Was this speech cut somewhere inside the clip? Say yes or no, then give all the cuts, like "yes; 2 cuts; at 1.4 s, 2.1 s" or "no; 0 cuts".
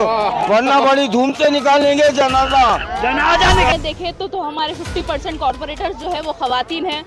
yes; 1 cut; at 3.7 s